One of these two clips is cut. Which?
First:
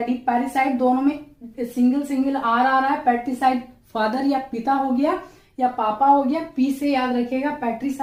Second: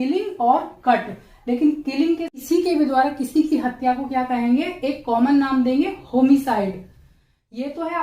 second; 1 cut; at 2.3 s

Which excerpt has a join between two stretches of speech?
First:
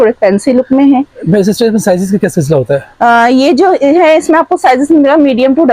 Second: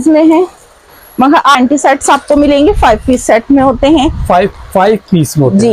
second; 1 cut; at 1.5 s

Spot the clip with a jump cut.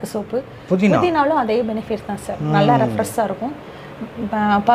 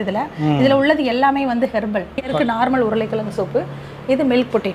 second; 1 cut; at 2.3 s

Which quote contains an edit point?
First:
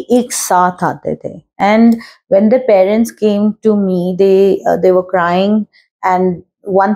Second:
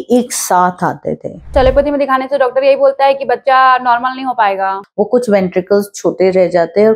second; 2 cuts; at 1.5 s, 4.8 s

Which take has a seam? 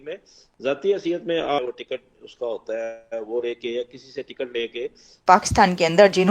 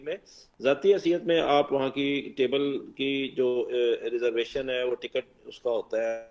first; 2 cuts; at 1.6 s, 5.1 s

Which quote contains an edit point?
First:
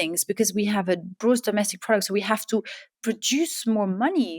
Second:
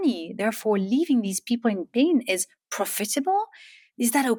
first; 1 cut; at 1.2 s

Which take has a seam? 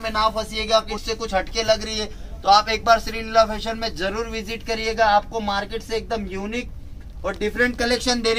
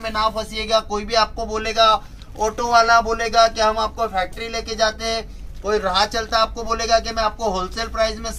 first; 1 cut; at 0.9 s

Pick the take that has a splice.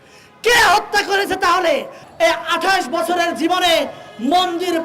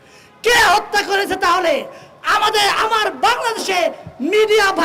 first; 1 cut; at 2.0 s

